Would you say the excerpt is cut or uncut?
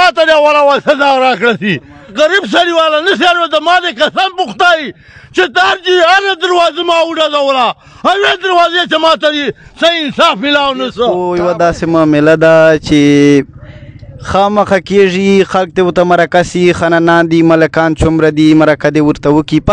cut